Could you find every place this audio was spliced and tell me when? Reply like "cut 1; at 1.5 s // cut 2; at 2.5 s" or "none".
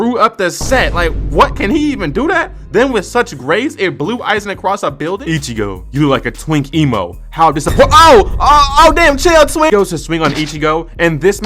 cut 1; at 5.2 s // cut 2; at 9.7 s